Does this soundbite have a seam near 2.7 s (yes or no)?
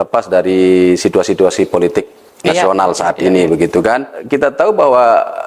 no